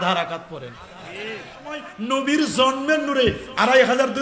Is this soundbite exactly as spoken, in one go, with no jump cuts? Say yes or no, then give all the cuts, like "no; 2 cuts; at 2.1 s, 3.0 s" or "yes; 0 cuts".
no; 1 cut; at 2.1 s